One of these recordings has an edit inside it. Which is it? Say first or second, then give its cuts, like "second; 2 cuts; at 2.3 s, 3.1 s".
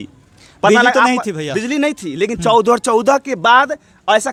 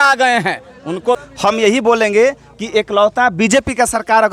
second; 1 cut; at 1.2 s